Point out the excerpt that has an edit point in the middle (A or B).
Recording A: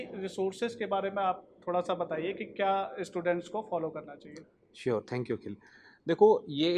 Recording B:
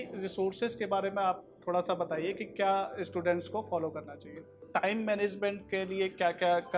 B